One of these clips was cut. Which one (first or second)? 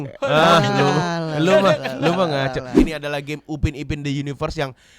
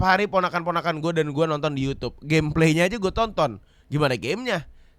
first